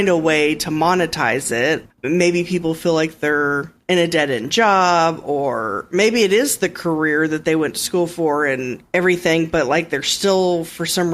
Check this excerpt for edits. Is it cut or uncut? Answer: cut